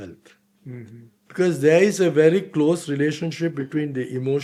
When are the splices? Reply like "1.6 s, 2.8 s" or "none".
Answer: none